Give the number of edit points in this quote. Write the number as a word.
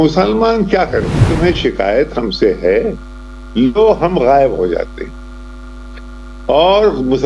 one